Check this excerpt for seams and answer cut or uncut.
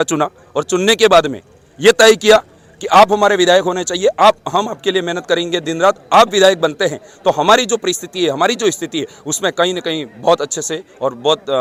uncut